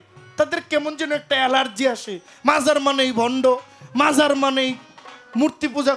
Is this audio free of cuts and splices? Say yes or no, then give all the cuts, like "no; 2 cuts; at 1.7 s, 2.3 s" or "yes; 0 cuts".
yes; 0 cuts